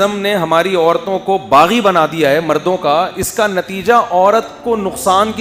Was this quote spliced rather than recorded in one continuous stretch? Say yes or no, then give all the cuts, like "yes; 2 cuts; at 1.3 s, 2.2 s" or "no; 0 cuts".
no; 0 cuts